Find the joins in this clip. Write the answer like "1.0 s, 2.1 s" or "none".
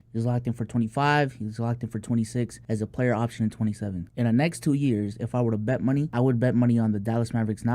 2.6 s, 6.1 s